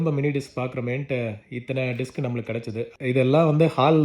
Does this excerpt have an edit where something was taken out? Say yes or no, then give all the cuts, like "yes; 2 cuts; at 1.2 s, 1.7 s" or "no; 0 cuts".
yes; 1 cut; at 2.9 s